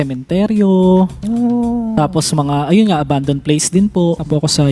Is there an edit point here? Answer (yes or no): no